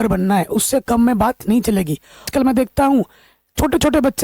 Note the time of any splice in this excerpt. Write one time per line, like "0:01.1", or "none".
0:02.3